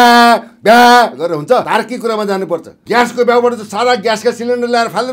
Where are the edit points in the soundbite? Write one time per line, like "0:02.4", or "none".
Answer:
0:02.8